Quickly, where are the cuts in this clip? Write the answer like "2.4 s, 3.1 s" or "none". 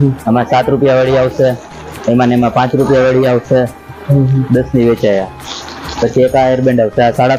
none